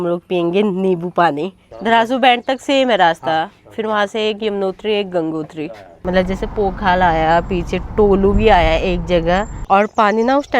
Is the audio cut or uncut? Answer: cut